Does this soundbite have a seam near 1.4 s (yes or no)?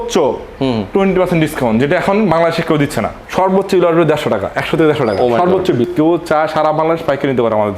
no